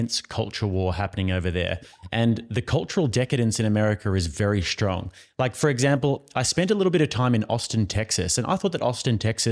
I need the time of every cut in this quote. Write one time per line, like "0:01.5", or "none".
none